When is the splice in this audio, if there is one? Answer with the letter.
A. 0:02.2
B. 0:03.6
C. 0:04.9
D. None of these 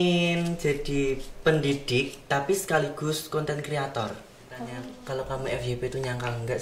C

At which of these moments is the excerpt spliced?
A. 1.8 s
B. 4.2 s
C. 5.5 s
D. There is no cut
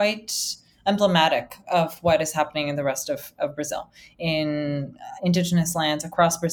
D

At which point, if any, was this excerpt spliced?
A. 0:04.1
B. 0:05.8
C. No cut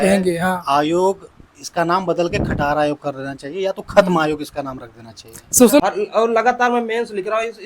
B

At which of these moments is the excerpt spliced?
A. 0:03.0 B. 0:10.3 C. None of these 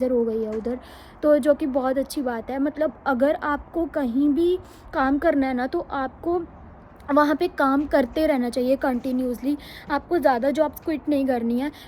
C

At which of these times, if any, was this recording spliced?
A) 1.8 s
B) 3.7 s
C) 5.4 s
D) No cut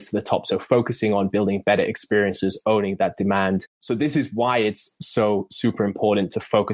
B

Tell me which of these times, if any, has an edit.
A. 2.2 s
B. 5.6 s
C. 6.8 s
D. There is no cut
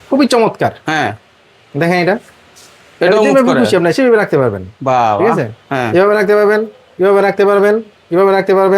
D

